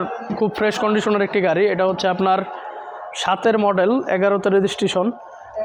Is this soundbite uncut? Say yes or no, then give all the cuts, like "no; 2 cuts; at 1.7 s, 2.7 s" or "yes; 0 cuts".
yes; 0 cuts